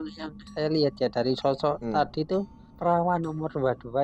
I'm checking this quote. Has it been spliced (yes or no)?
yes